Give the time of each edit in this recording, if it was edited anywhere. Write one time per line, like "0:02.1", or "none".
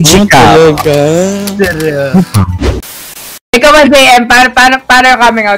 0:03.0